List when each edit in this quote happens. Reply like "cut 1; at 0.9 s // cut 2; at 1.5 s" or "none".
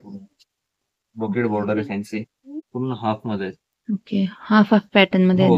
cut 1; at 2.6 s